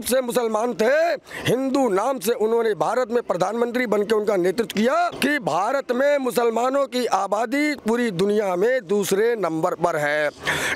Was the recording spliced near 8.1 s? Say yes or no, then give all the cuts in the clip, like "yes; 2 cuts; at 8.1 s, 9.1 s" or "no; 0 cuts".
no; 1 cut; at 5.1 s